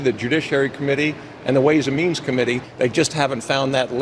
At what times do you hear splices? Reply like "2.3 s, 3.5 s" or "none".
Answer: 2.7 s